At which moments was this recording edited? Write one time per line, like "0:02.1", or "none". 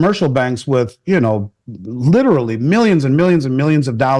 none